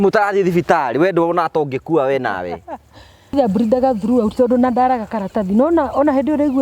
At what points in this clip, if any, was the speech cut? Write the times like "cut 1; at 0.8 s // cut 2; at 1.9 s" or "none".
cut 1; at 3.4 s